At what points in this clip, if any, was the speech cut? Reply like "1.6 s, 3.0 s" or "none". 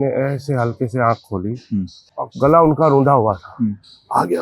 2.0 s